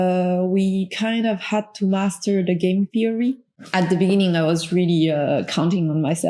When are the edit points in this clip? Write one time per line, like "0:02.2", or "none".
0:03.5